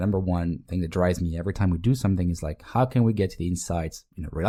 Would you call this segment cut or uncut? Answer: uncut